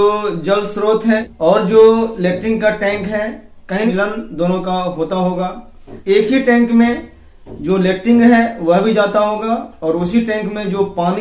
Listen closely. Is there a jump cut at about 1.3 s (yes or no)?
yes